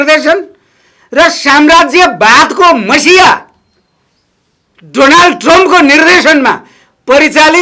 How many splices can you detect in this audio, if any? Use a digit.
0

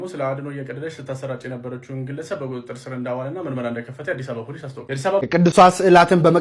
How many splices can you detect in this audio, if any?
1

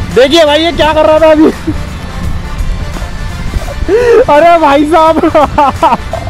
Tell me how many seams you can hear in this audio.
0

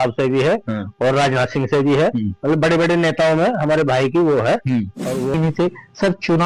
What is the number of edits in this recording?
1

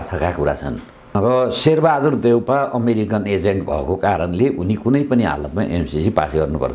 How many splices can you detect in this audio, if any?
1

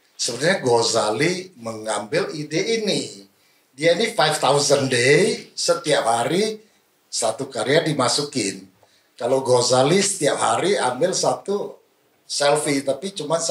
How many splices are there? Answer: 0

